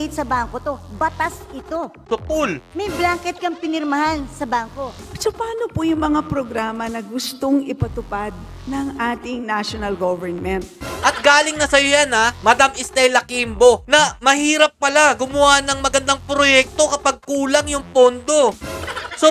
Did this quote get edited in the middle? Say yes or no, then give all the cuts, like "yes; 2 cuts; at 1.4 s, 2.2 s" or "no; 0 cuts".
yes; 2 cuts; at 5.1 s, 10.8 s